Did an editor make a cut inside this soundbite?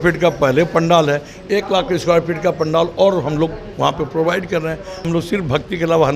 yes; 1 cut; at 5.1 s

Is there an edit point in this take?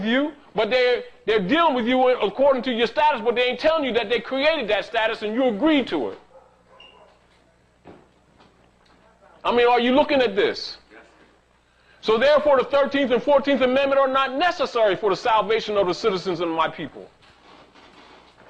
yes; 1 cut; at 9.1 s

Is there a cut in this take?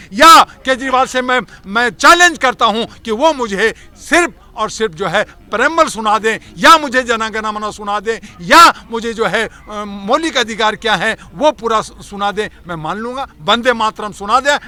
no; 0 cuts

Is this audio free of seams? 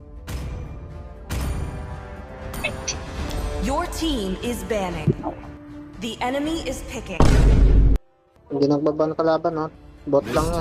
no; 4 cuts; at 5.3 s, 7.1 s, 8.4 s, 9.8 s

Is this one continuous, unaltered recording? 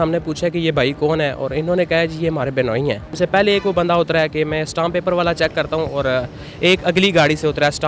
no; 1 cut; at 3.1 s

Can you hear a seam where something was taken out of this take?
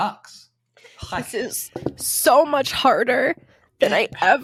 no; 0 cuts

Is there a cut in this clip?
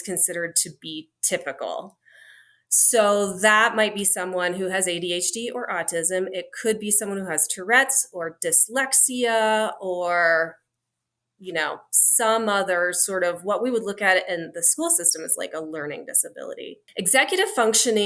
yes; 1 cut; at 16.8 s

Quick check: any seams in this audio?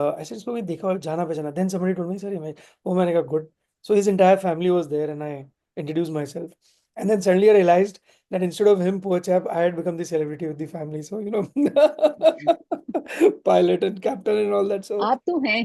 no; 0 cuts

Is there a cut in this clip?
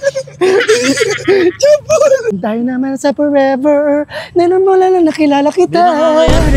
yes; 1 cut; at 2.3 s

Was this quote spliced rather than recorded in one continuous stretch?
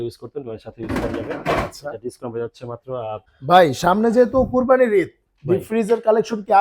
yes; 1 cut; at 3.3 s

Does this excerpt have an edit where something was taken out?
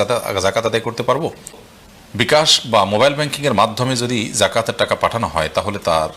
yes; 1 cut; at 1.2 s

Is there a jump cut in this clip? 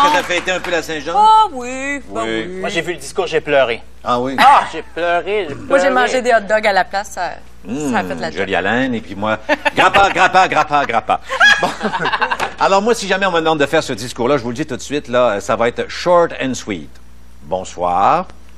no; 0 cuts

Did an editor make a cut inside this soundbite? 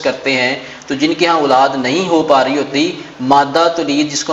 no; 0 cuts

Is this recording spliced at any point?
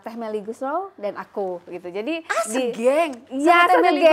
no; 0 cuts

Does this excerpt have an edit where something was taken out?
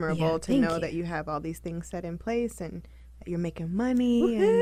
no; 0 cuts

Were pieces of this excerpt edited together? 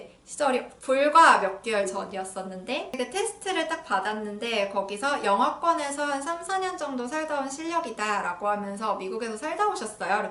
yes; 1 cut; at 3.0 s

